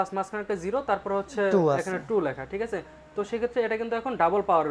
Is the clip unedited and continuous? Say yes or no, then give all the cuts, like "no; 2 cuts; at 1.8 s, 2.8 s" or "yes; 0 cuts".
yes; 0 cuts